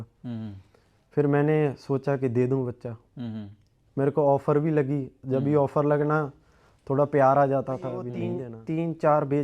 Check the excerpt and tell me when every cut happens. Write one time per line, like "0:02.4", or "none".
0:08.3